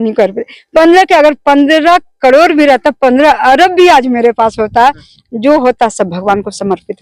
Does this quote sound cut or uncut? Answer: cut